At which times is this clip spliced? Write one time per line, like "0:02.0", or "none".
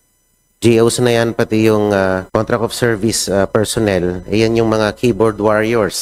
0:02.3